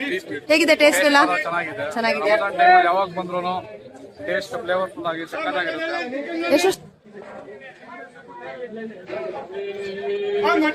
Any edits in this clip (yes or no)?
yes